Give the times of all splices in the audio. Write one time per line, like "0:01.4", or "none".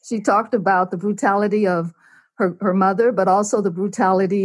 none